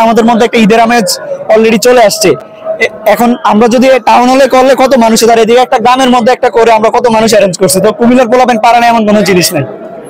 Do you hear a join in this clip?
no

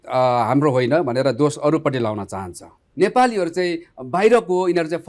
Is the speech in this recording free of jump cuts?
no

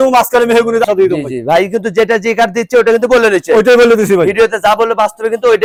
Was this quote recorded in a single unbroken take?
yes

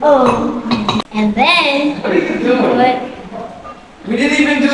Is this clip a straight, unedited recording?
no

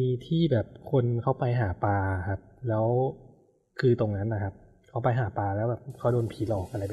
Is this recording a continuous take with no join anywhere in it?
yes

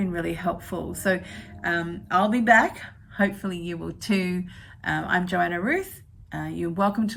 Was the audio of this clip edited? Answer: no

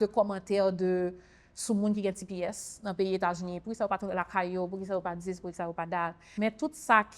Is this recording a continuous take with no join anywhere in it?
no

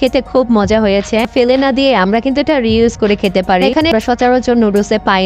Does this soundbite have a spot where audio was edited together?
yes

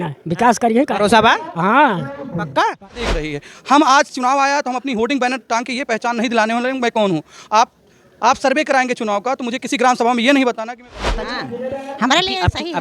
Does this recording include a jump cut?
yes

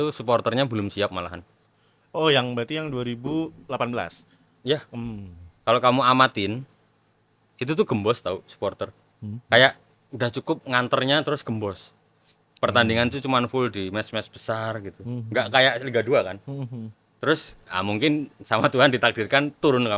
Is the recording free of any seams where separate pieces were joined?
yes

